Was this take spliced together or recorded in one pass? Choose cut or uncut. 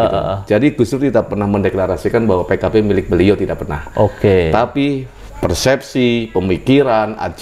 uncut